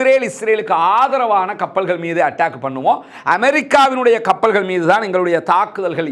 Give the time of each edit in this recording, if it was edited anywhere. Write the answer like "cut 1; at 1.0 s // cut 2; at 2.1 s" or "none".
none